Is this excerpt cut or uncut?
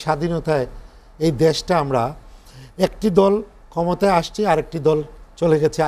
uncut